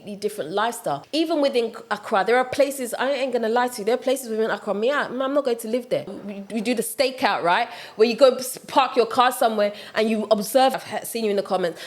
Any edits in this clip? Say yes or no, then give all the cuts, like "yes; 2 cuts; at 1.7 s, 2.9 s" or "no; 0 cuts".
yes; 3 cuts; at 1.0 s, 6.2 s, 10.7 s